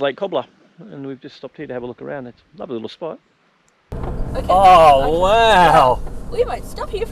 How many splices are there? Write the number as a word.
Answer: one